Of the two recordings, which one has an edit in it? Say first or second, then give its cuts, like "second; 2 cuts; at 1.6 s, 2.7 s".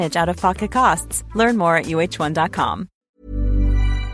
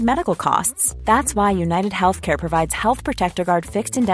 first; 1 cut; at 3.0 s